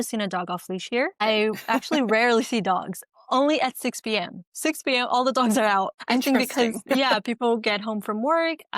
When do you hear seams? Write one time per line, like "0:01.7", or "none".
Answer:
0:01.2
0:05.9